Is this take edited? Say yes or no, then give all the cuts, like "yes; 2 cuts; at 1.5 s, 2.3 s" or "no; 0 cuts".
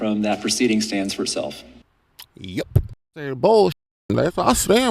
yes; 1 cut; at 3.3 s